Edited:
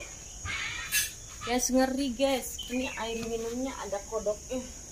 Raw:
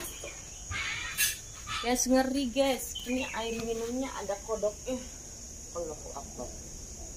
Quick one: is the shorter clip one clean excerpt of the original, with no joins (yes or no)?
no